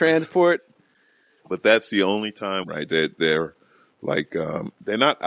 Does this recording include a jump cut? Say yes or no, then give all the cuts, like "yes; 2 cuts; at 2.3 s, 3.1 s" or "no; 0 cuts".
no; 0 cuts